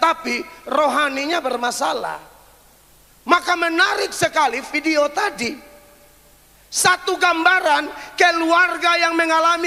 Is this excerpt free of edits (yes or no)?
yes